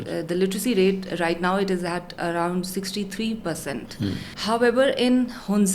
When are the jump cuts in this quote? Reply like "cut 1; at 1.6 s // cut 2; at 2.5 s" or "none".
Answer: cut 1; at 4.3 s